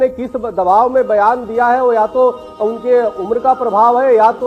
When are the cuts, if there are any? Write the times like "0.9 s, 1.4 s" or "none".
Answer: none